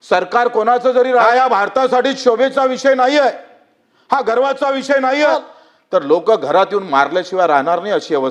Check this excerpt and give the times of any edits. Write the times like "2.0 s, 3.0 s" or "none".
1.3 s, 5.3 s